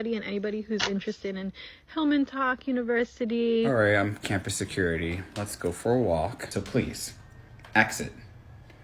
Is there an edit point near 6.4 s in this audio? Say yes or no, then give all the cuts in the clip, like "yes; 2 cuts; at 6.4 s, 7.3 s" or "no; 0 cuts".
yes; 1 cut; at 6.4 s